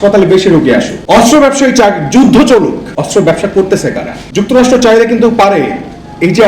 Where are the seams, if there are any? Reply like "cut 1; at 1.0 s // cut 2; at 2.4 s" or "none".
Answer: cut 1; at 1.0 s // cut 2; at 2.9 s // cut 3; at 4.2 s